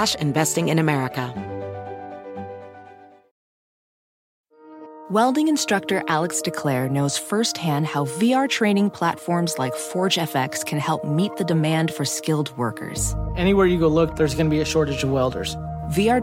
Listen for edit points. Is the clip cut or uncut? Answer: cut